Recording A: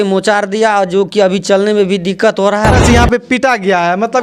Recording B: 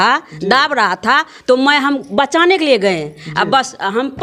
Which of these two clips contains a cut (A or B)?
A